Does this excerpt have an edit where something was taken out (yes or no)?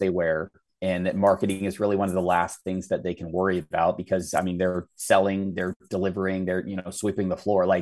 no